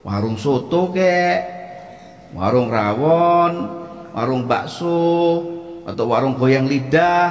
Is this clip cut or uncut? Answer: uncut